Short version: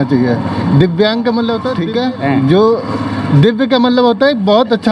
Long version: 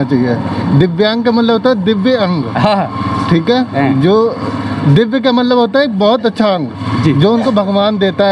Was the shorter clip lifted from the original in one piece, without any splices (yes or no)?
no